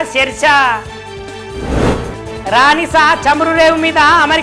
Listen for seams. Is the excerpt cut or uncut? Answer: uncut